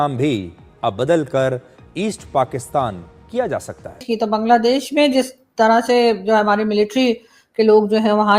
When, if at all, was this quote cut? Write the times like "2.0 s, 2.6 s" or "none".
4.0 s